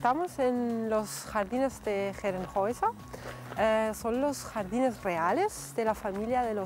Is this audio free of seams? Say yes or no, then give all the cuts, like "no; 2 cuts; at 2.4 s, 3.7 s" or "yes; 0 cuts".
yes; 0 cuts